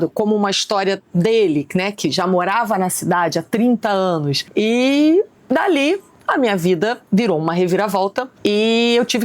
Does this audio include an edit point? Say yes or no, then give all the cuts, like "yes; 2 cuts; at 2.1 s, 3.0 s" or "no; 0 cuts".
yes; 2 cuts; at 4.4 s, 8.3 s